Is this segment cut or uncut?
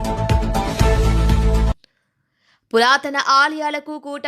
cut